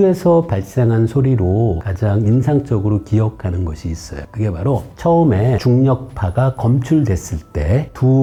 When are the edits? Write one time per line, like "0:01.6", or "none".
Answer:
none